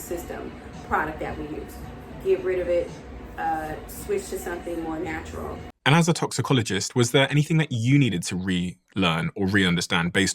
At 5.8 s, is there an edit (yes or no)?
yes